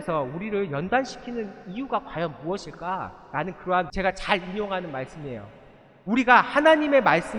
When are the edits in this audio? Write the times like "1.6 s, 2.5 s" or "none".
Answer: 3.9 s